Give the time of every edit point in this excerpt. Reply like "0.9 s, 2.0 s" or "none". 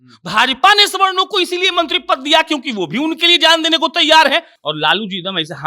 4.6 s